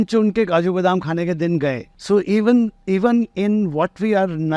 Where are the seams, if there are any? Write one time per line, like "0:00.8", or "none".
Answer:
0:01.9